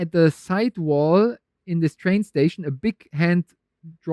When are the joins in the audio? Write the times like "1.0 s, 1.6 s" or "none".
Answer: none